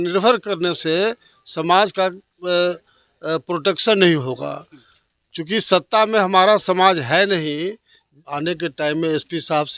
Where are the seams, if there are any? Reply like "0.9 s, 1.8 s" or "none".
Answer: 8.2 s